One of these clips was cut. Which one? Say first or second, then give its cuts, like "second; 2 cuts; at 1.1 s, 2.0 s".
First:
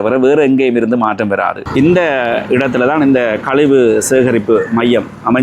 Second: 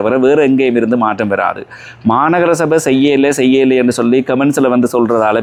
first; 1 cut; at 1.6 s